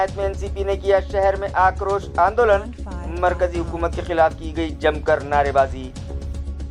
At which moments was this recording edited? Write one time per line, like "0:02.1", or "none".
none